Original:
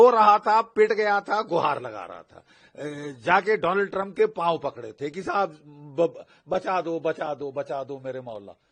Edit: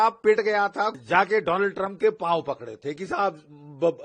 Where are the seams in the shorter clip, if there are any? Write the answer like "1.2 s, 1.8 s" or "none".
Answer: 0.9 s